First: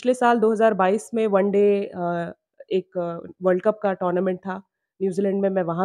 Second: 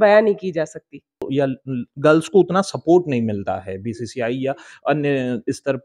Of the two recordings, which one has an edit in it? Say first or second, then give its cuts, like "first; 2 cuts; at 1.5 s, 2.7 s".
second; 1 cut; at 1.2 s